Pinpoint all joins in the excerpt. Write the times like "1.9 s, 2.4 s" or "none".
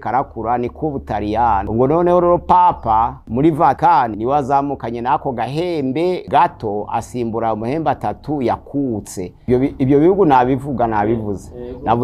1.7 s, 3.9 s, 6.2 s, 9.4 s